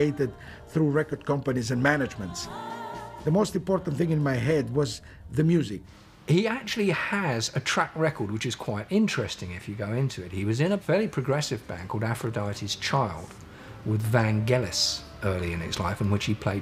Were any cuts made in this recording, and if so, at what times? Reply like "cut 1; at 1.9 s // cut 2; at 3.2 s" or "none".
cut 1; at 4.1 s